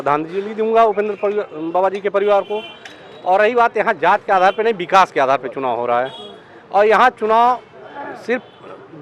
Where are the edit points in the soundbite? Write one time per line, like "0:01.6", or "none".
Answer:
none